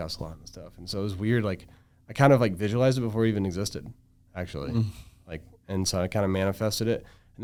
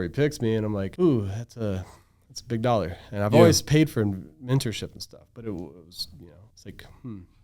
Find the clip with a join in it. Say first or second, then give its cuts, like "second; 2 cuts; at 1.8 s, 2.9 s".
second; 2 cuts; at 0.9 s, 6.5 s